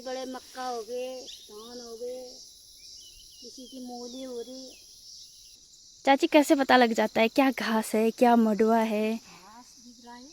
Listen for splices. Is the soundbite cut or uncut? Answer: cut